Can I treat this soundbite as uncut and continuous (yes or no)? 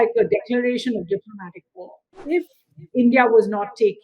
no